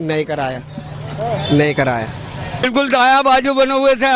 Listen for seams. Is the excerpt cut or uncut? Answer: cut